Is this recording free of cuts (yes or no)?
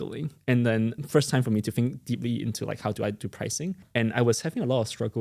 no